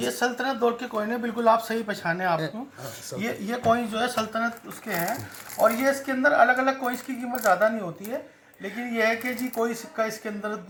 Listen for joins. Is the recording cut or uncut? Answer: uncut